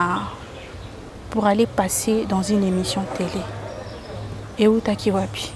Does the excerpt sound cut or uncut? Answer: uncut